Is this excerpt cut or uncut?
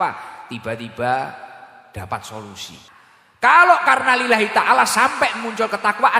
cut